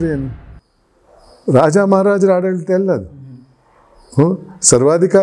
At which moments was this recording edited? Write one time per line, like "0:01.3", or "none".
none